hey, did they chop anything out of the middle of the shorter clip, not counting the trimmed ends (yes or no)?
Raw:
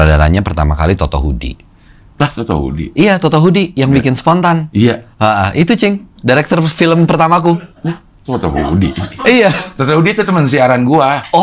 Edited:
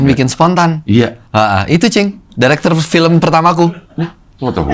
no